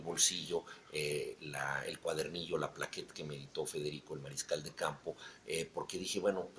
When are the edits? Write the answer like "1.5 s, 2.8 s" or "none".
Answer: 3.7 s

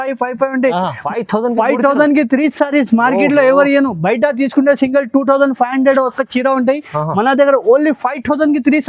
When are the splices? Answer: 1.0 s

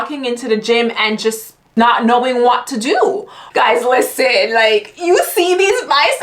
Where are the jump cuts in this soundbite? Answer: 1.8 s, 3.3 s

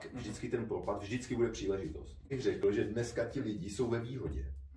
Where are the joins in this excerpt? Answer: 2.5 s

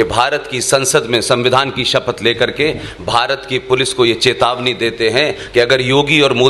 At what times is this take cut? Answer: none

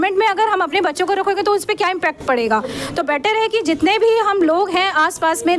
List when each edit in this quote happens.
none

